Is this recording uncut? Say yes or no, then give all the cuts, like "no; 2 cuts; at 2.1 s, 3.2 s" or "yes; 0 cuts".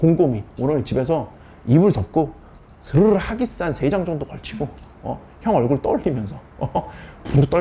yes; 0 cuts